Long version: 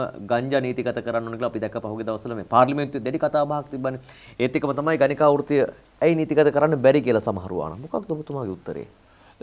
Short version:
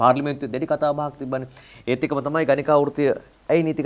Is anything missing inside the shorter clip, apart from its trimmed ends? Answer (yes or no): no